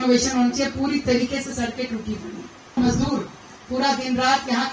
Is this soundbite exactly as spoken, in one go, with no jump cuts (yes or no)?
no